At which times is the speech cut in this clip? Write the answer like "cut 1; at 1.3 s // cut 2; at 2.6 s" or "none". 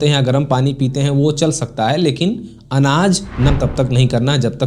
cut 1; at 3.5 s